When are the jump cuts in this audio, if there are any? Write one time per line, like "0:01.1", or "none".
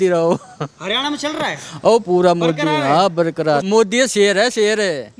0:03.6